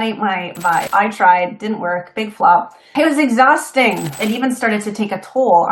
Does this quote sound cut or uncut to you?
cut